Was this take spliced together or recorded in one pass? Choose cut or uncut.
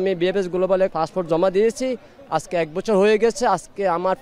cut